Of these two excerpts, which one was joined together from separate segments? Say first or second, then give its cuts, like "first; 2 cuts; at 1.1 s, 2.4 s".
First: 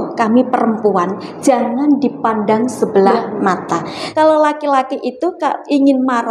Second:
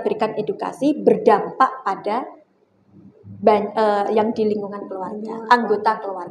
first; 1 cut; at 4.0 s